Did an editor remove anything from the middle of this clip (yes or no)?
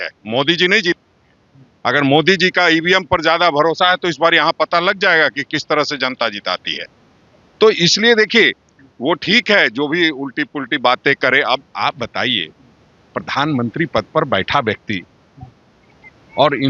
no